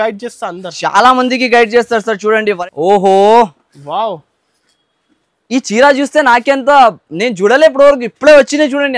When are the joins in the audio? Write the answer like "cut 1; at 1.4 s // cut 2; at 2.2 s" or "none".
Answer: cut 1; at 2.6 s